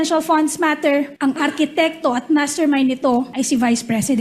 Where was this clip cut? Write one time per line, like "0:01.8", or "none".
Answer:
0:01.1
0:03.3